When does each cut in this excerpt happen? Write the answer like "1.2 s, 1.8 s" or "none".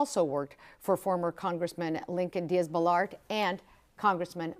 3.3 s